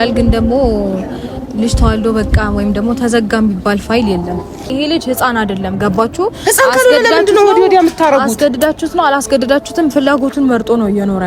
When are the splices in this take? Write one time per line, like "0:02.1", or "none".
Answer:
0:04.7